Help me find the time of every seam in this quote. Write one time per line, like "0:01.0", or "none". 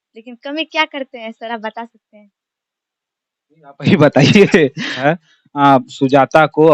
0:05.0